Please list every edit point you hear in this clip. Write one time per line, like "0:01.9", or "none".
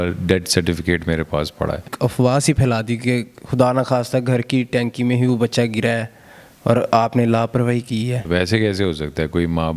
0:01.9
0:08.3

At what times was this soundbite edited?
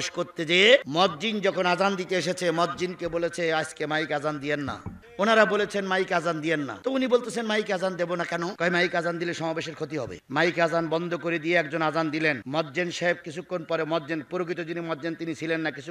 none

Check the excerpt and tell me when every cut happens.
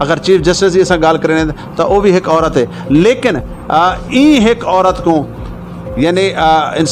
none

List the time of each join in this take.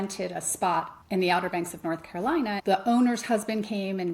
0:01.0
0:02.6

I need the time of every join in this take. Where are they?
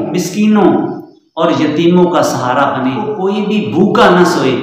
0:03.1

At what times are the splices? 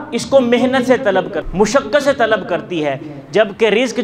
0:01.4

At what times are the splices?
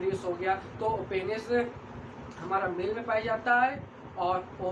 none

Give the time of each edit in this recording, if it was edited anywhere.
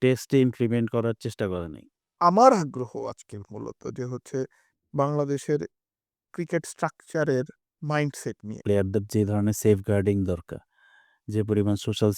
0:02.1
0:08.5

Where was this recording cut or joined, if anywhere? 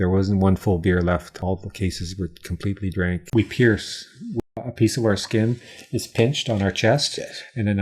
0:01.3
0:03.2
0:04.6

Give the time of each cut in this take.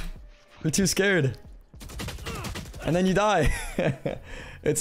none

